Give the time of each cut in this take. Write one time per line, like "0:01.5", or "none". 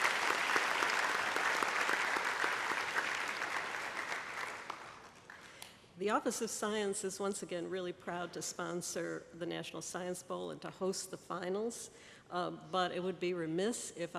none